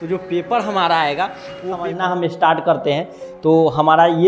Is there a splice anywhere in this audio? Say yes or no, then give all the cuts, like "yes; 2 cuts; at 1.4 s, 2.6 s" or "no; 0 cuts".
yes; 1 cut; at 1.9 s